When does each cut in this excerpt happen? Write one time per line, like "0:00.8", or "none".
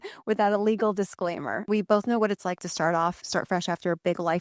0:01.7
0:03.2